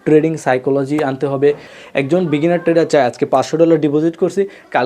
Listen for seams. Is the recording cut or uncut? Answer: cut